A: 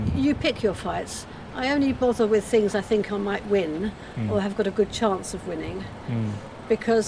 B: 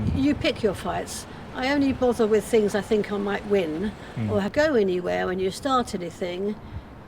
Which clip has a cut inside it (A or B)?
B